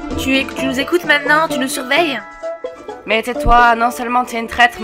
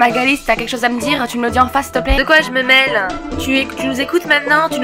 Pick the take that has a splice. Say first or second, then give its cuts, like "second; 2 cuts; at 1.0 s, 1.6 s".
second; 1 cut; at 2.2 s